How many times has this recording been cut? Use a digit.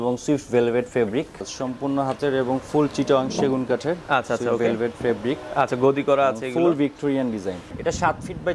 2